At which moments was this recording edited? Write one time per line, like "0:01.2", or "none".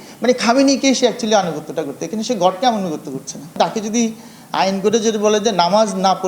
0:03.6